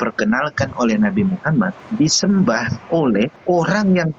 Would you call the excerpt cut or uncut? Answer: cut